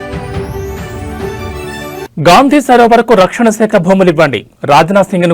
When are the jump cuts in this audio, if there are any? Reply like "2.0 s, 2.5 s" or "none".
1.8 s